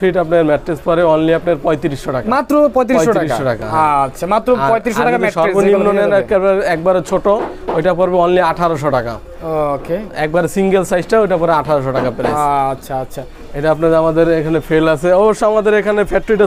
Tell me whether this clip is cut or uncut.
uncut